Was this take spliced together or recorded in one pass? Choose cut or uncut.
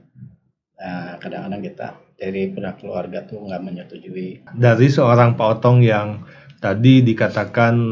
cut